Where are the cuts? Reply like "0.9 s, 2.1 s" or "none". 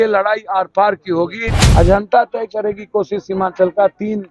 1.6 s